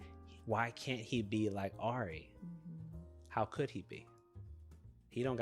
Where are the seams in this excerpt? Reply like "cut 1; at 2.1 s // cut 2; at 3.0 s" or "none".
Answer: none

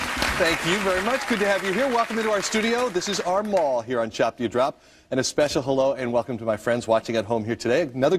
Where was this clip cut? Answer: none

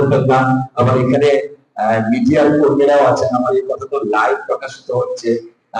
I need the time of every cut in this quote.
none

